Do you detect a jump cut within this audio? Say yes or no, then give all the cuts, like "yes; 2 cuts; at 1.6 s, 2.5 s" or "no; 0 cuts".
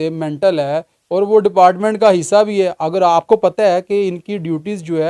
no; 0 cuts